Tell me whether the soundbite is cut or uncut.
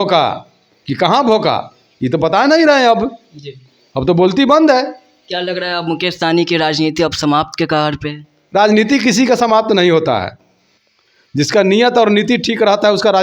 uncut